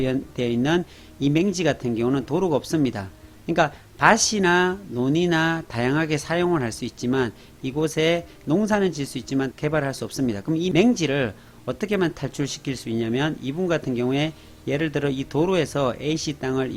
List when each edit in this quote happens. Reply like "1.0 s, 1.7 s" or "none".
none